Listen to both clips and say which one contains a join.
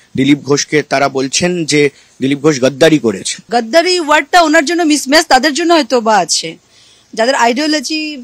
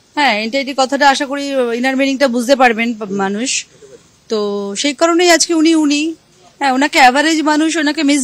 first; 1 cut; at 3.4 s

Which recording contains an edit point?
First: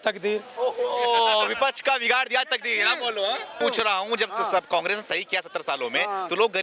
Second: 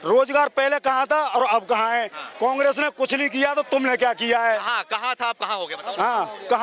first; 1 cut; at 3.5 s

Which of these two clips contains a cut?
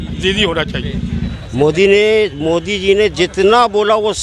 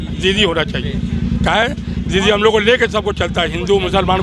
first; 1 cut; at 1.3 s

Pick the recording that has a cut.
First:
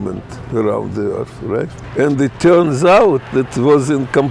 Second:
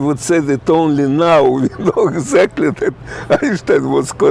first; 1 cut; at 1.8 s

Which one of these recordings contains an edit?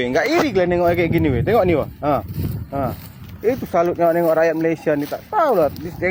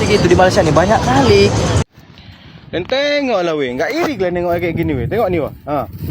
second; 1 cut; at 1.8 s

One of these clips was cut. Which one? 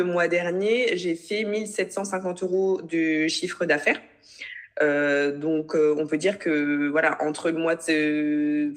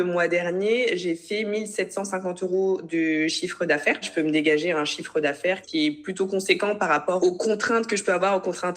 second; 3 cuts; at 4.1 s, 5.6 s, 7.2 s

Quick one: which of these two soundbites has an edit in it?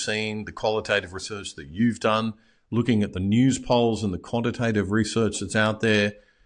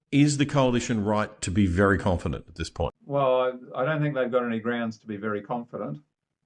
second; 1 cut; at 3.0 s

